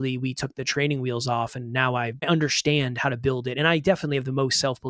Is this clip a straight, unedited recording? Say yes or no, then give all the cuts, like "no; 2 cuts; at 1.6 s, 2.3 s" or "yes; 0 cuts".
no; 1 cut; at 2.2 s